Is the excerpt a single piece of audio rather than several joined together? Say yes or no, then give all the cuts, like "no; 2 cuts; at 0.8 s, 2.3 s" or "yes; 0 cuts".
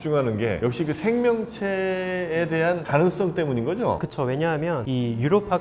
yes; 0 cuts